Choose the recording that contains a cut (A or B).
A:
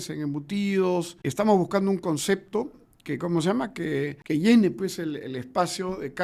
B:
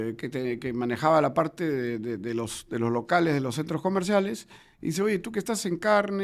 A